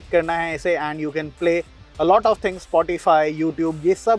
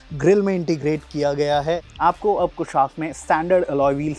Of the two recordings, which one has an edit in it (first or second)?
second